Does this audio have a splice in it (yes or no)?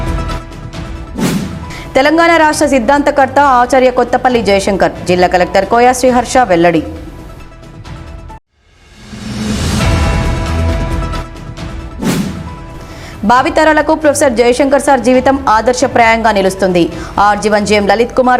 yes